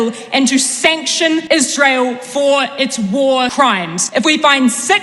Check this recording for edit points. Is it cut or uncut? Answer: cut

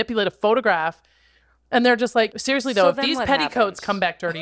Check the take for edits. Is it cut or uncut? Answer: cut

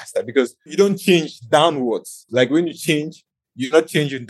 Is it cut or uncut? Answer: uncut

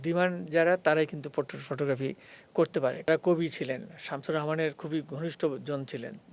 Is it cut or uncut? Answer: cut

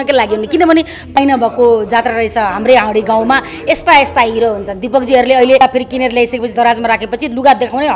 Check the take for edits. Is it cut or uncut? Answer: cut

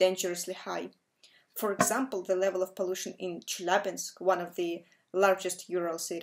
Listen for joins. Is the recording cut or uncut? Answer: cut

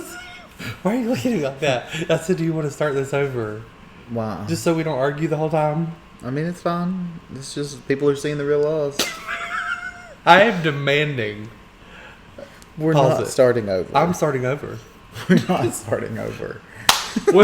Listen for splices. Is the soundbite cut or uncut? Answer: cut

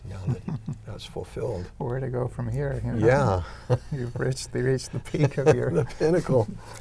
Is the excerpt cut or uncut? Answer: uncut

